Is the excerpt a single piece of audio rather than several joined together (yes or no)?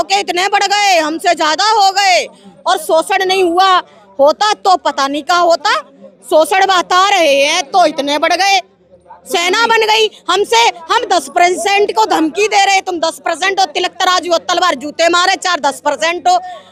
yes